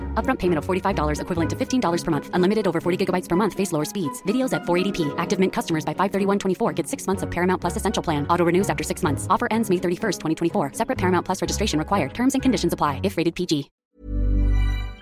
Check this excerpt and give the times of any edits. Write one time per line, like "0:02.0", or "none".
0:13.7